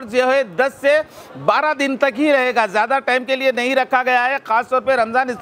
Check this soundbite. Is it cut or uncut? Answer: uncut